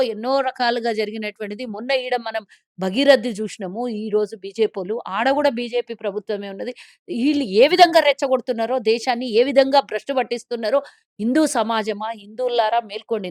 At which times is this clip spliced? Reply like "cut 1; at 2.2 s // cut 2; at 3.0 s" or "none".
none